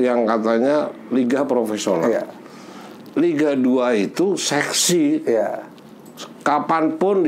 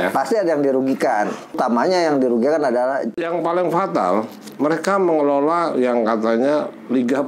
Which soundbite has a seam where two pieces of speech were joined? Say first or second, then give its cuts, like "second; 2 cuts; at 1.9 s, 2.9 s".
second; 2 cuts; at 1.6 s, 3.1 s